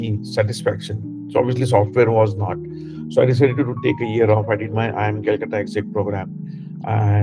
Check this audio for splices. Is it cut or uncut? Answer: uncut